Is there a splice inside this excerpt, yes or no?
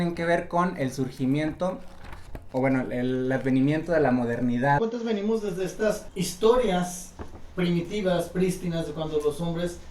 yes